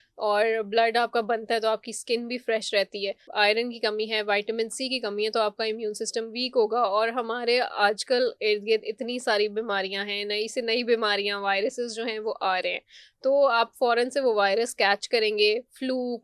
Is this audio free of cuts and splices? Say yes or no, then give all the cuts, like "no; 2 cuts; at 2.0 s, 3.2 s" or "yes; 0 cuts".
no; 1 cut; at 3.3 s